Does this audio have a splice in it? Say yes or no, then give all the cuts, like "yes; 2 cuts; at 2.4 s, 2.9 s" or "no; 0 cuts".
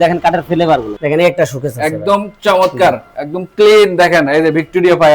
yes; 1 cut; at 1.0 s